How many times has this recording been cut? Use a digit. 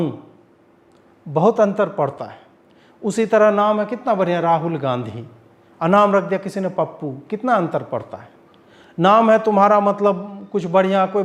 0